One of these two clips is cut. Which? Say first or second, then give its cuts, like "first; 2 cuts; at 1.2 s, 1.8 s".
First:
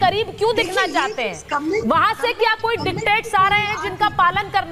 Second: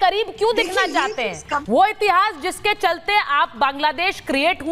second; 1 cut; at 1.5 s